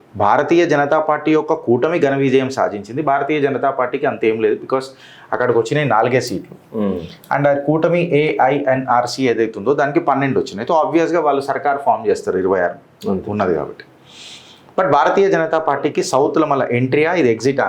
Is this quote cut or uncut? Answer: uncut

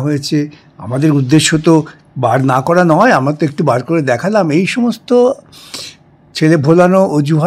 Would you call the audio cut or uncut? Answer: uncut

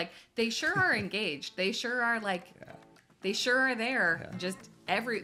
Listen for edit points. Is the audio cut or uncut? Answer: uncut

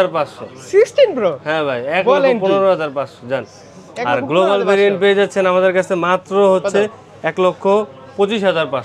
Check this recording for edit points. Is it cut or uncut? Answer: uncut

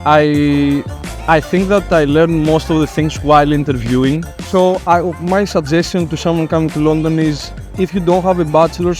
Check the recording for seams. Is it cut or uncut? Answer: cut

